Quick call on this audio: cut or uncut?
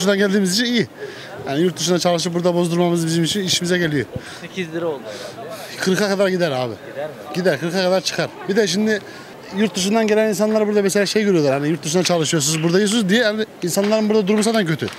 uncut